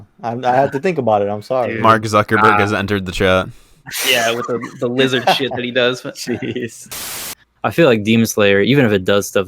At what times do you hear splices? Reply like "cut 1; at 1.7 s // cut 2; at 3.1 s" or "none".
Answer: cut 1; at 7.2 s